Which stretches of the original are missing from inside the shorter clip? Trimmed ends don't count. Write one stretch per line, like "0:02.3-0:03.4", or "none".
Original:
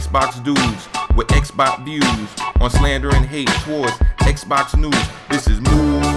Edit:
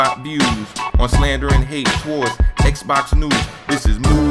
none